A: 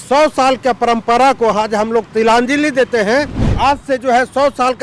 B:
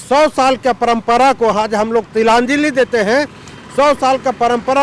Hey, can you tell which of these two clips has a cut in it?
A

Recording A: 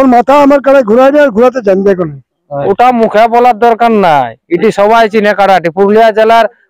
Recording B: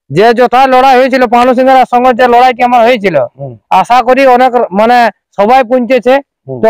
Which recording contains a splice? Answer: A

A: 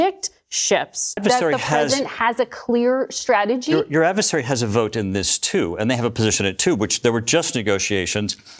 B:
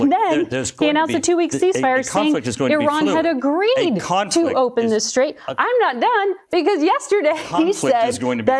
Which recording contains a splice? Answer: A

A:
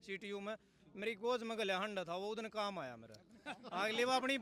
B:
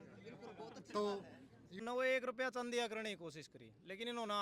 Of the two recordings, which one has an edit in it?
B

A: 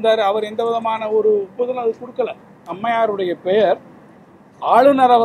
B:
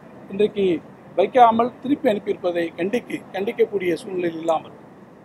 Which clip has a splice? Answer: A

